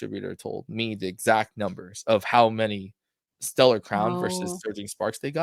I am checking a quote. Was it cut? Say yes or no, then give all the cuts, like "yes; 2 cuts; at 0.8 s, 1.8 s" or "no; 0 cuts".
no; 0 cuts